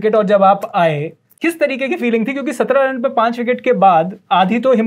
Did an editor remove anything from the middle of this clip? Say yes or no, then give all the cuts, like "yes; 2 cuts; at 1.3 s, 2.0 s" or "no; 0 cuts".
yes; 1 cut; at 1.4 s